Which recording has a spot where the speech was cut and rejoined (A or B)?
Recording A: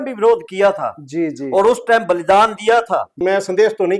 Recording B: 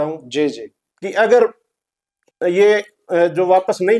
A